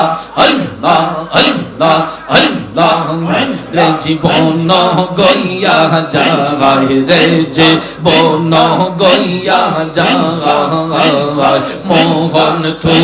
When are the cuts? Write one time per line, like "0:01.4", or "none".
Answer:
none